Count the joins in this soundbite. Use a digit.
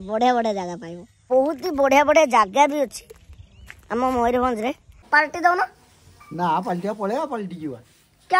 2